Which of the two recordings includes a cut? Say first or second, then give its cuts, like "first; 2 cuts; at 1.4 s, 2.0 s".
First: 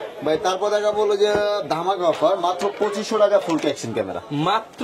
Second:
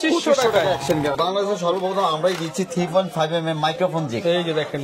second; 1 cut; at 1.1 s